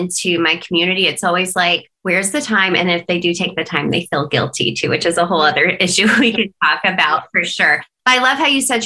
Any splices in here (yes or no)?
yes